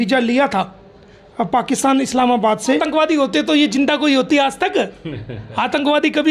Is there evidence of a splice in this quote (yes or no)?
yes